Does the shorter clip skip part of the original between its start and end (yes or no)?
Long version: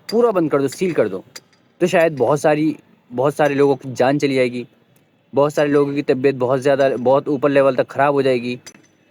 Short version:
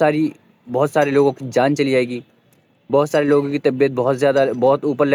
no